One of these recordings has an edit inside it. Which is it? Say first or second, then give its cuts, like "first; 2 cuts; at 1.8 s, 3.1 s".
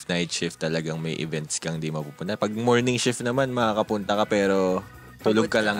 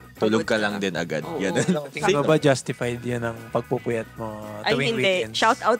second; 1 cut; at 1.7 s